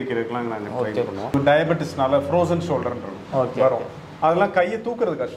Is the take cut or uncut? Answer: cut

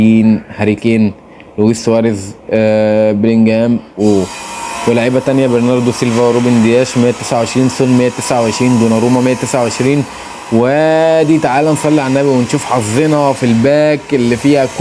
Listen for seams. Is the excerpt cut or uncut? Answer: uncut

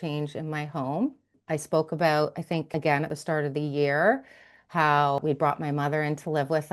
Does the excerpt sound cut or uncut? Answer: cut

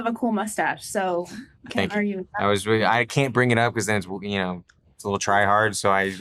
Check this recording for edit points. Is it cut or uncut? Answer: uncut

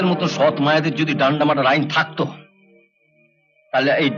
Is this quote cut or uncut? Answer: uncut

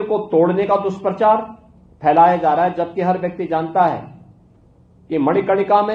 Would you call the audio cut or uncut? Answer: uncut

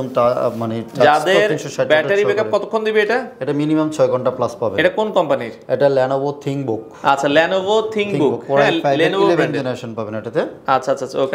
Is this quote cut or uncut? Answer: uncut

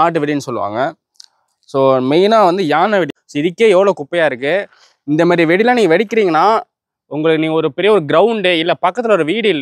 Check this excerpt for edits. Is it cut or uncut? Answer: cut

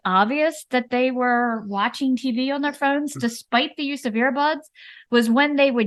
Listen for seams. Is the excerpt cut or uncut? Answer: uncut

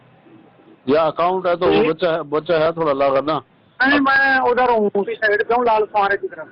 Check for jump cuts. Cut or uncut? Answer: uncut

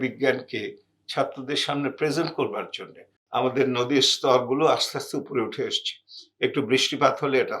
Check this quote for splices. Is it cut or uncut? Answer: cut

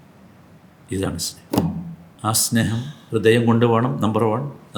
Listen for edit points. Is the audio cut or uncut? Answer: cut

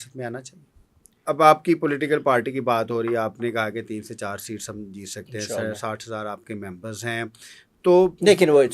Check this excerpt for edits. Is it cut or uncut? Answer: cut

